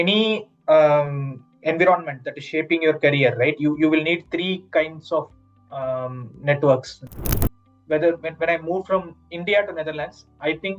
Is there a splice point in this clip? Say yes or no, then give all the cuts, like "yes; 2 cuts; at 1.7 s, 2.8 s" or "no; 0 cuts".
yes; 1 cut; at 7.2 s